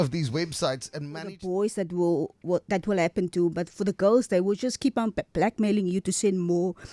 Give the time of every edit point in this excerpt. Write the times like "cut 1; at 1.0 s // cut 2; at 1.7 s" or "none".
cut 1; at 1.3 s